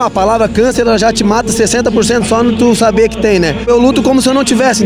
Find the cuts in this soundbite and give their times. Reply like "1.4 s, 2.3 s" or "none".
none